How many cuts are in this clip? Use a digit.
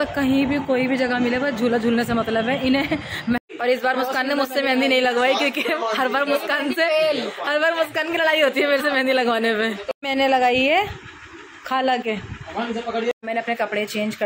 3